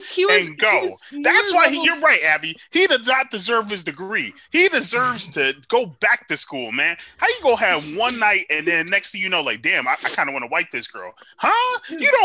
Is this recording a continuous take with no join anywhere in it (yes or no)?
yes